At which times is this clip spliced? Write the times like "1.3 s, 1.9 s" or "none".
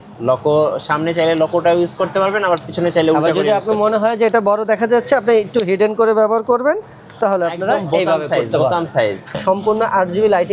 9.4 s